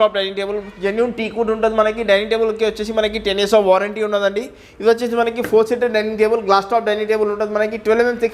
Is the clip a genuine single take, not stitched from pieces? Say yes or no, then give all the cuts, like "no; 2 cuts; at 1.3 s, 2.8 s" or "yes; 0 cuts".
yes; 0 cuts